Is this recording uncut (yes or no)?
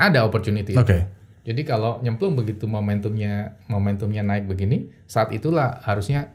yes